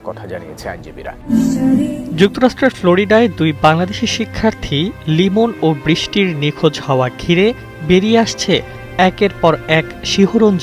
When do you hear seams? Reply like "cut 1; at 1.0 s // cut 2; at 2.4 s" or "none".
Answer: cut 1; at 1.2 s